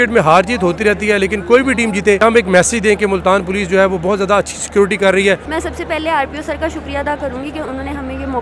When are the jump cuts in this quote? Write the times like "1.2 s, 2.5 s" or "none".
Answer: 2.2 s, 5.5 s

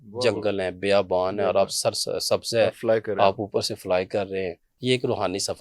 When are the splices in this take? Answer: 4.7 s

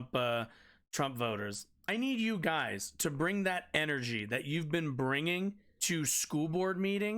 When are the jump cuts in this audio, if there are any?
1.8 s, 5.7 s

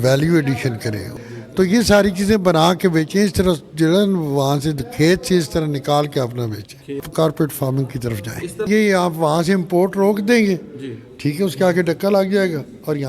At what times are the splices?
1.2 s, 7.1 s, 8.7 s

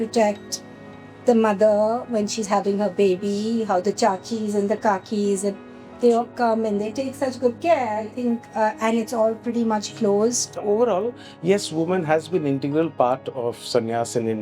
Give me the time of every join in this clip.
10.5 s

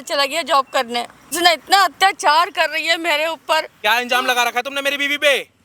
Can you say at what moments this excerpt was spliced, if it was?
1.3 s, 3.7 s

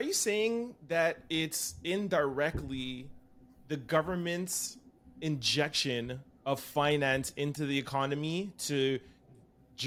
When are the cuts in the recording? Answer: none

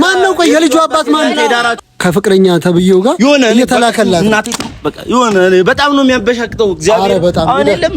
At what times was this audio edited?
1.7 s

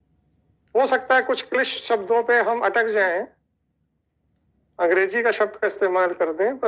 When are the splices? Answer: none

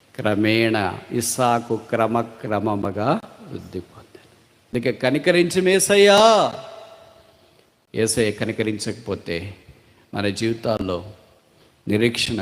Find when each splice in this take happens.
4.7 s

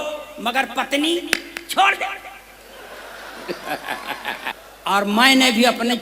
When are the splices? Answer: 4.6 s

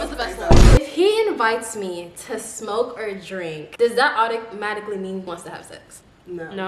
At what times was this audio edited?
0.8 s, 5.3 s

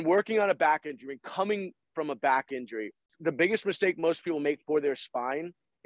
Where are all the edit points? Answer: 3.1 s

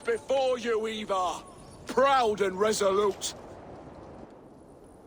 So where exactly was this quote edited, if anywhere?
none

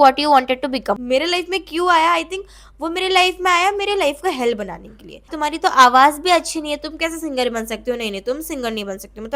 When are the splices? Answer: 0.9 s, 5.3 s

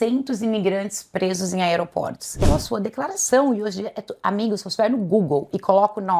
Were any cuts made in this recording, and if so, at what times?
2.4 s

